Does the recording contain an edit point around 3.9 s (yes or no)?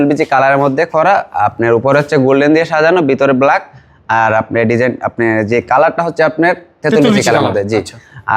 no